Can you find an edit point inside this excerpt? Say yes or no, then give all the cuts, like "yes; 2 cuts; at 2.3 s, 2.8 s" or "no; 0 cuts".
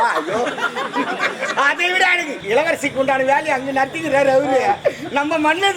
yes; 1 cut; at 2.3 s